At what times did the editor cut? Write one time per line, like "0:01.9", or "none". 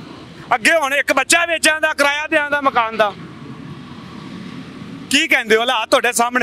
none